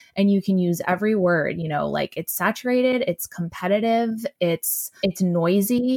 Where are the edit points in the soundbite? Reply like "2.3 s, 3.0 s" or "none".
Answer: 4.8 s